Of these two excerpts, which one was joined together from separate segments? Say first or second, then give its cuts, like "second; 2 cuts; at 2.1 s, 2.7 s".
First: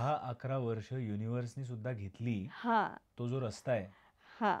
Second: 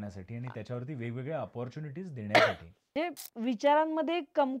second; 1 cut; at 2.9 s